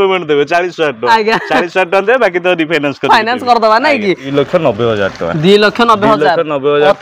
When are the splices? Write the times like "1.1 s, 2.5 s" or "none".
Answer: 4.2 s